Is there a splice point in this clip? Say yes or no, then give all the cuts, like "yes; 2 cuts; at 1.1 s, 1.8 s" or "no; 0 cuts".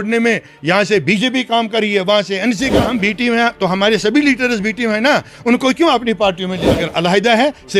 yes; 2 cuts; at 2.8 s, 6.6 s